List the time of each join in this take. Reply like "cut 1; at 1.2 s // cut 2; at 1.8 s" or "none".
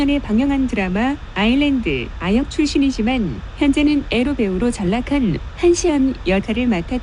cut 1; at 3.8 s